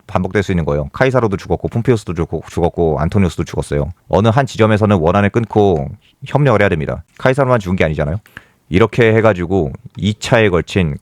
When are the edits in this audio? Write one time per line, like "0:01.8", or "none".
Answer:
0:08.3